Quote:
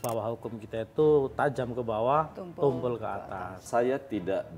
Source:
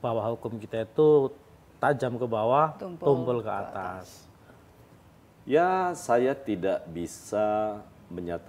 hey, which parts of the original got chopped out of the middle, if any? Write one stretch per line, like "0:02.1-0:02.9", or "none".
0:01.3-0:01.8
0:04.1-0:06.0